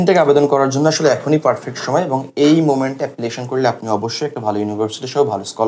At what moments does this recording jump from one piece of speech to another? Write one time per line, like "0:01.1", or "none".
none